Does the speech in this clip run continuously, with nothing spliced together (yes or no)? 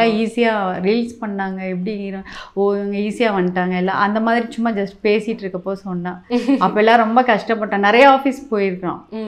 yes